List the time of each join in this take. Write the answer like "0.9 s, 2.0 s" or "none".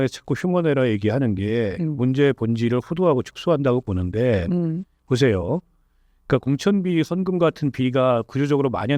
none